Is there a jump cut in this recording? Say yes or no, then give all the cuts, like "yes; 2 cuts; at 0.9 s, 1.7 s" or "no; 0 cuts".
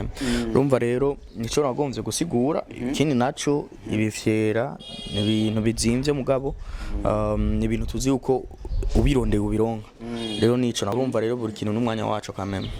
yes; 1 cut; at 10.9 s